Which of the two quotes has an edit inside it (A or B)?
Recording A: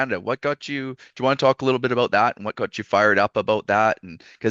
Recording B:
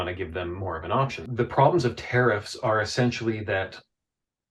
B